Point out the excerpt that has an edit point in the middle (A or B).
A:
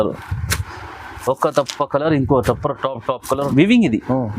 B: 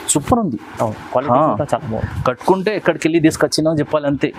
A